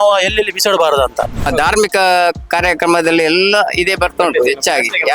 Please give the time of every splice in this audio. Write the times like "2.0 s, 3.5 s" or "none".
1.5 s